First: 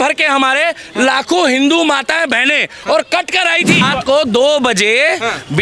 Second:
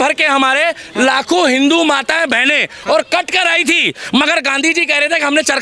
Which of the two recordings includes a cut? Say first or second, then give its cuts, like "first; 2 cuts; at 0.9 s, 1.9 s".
first; 1 cut; at 3.8 s